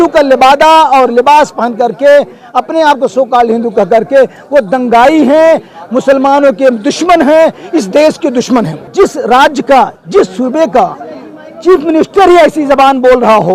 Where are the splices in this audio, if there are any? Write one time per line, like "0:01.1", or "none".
0:08.8